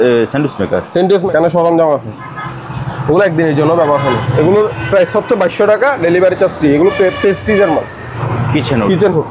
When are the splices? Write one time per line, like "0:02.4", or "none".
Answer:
0:01.3
0:08.1